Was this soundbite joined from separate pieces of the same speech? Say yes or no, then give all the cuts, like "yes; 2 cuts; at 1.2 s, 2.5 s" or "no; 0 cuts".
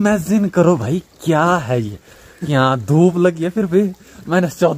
no; 0 cuts